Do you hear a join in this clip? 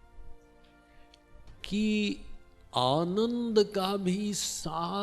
no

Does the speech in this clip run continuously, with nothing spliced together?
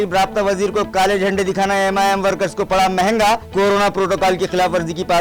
yes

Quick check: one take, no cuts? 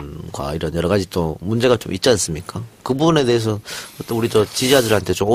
no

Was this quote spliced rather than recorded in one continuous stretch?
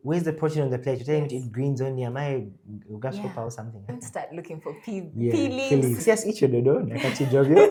no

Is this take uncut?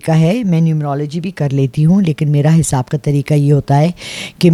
yes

